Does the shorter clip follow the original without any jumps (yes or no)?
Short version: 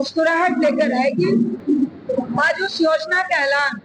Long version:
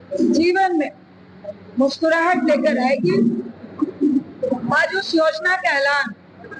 no